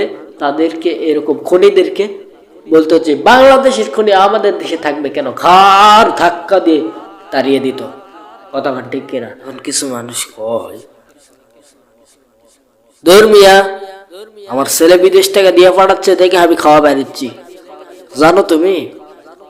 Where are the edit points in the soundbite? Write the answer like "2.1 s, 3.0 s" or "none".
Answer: 9.4 s